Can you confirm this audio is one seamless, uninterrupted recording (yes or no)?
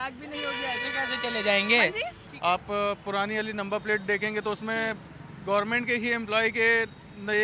no